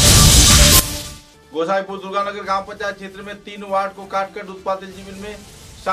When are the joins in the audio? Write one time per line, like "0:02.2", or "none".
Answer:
none